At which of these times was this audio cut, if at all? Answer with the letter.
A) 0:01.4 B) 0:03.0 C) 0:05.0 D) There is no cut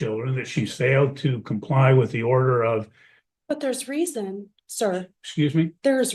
D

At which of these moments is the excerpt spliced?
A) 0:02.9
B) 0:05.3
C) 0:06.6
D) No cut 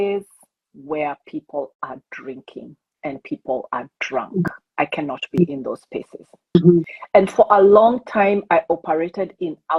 C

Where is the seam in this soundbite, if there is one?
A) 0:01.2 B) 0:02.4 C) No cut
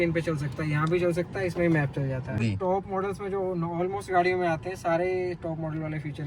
B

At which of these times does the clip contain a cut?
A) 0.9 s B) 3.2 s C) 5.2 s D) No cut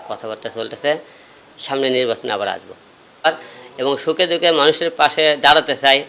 B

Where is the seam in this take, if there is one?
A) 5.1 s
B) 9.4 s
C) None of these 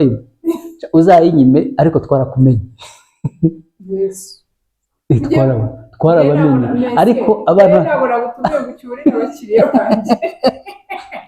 C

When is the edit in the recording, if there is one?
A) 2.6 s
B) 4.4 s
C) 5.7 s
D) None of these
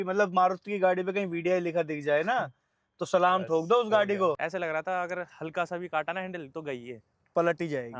B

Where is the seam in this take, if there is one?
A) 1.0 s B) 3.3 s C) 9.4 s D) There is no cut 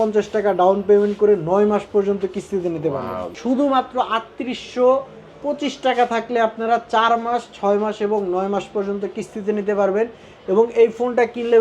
B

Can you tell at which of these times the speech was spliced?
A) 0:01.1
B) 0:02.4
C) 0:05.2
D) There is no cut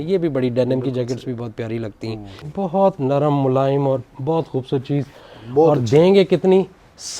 B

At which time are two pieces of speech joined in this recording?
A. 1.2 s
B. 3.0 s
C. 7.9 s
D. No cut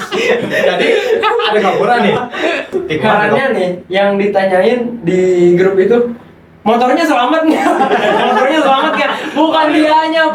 B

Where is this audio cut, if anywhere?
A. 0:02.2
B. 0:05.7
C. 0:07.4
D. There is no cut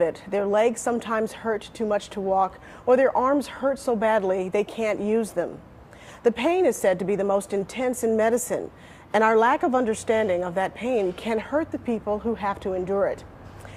D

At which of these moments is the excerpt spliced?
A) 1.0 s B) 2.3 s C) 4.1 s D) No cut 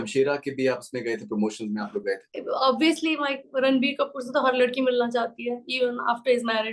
B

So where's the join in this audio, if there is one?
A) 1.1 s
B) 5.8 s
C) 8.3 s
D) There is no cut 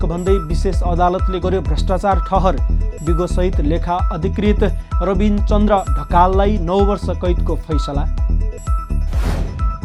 D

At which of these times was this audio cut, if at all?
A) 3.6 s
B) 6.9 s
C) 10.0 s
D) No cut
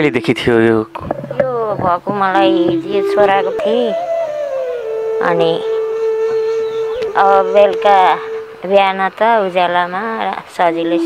A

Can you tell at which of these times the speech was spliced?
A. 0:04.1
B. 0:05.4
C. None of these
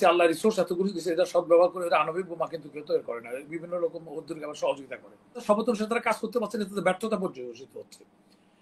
B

